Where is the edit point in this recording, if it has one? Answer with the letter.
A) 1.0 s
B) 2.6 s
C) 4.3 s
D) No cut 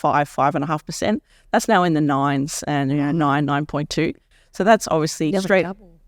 D